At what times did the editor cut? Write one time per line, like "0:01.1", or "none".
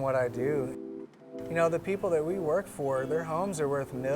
0:00.9